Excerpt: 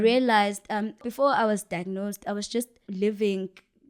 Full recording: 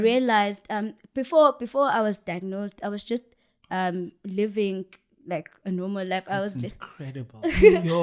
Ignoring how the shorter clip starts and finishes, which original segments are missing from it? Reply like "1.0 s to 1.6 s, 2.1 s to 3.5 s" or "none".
1.1 s to 1.6 s, 3.4 s to 4.2 s